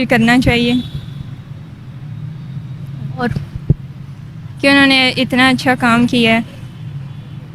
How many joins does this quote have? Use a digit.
0